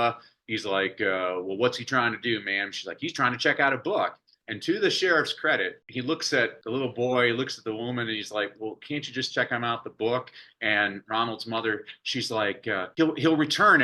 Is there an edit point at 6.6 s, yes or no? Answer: yes